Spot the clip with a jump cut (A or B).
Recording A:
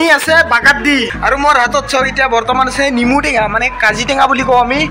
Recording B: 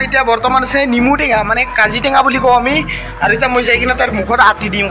A